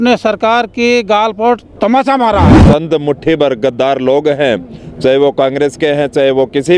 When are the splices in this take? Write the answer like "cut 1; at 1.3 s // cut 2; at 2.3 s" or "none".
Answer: cut 1; at 2.5 s

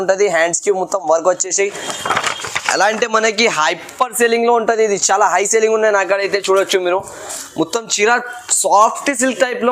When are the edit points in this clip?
none

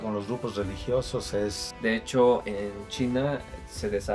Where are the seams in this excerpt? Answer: cut 1; at 1.7 s

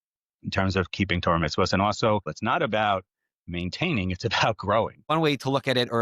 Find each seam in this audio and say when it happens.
cut 1; at 2.3 s // cut 2; at 5.1 s

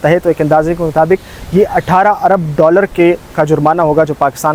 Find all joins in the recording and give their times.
none

